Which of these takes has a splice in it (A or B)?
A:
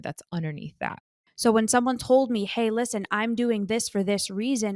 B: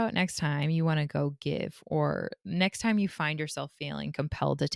A